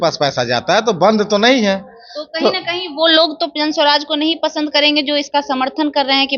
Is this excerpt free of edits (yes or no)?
yes